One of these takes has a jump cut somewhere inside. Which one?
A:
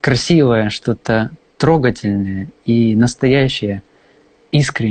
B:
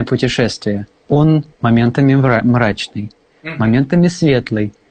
B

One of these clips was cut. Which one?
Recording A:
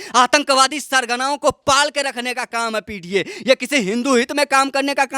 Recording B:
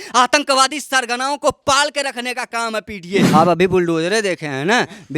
B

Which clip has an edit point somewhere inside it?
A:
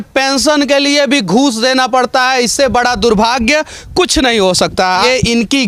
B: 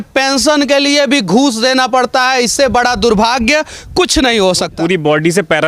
B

